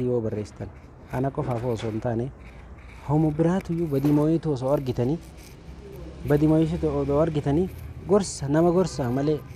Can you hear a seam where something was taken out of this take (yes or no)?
no